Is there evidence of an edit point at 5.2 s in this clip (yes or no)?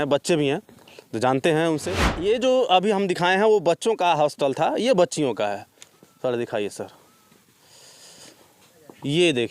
no